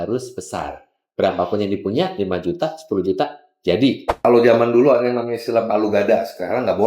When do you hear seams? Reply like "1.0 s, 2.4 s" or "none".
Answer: 4.1 s